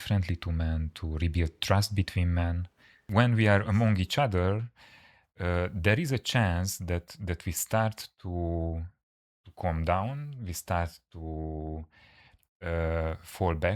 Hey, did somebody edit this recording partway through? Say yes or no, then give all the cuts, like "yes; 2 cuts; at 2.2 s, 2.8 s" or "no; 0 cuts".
yes; 1 cut; at 3.0 s